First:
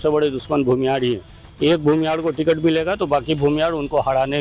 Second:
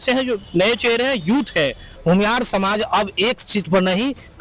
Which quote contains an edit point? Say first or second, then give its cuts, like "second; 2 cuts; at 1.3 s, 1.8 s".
second; 1 cut; at 1.9 s